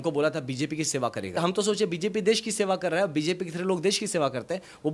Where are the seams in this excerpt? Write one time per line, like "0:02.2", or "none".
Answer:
0:01.4